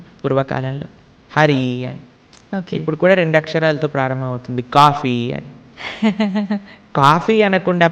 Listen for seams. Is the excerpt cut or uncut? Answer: cut